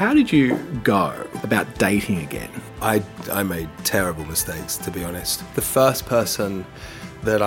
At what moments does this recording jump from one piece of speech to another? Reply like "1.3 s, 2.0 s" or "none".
1.3 s, 2.6 s, 5.3 s